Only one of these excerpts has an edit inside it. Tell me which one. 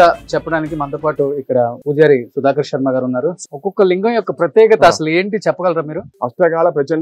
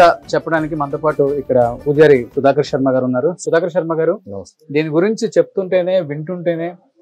first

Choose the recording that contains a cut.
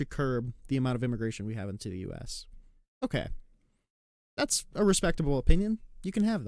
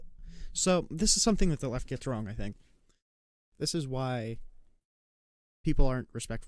second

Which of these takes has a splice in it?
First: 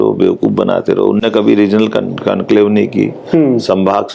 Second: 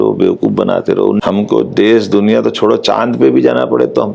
second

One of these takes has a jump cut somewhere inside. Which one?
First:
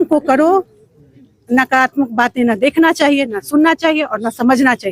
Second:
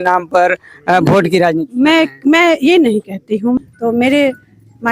second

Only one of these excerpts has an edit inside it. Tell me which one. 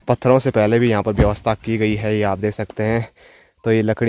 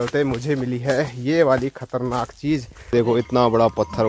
second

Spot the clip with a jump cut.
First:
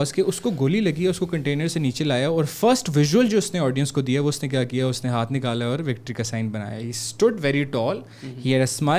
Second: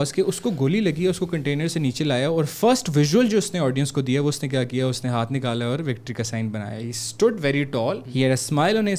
second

